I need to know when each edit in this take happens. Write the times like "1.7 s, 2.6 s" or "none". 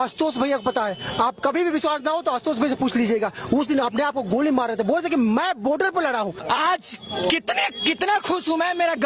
6.4 s